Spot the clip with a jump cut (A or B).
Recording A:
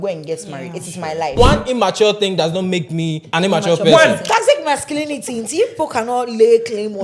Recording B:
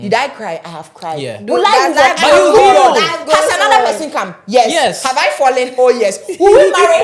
A